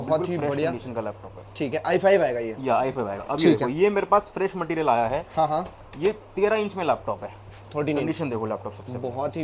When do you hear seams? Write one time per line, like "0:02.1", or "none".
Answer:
none